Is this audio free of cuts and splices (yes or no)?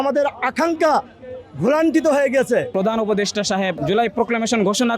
no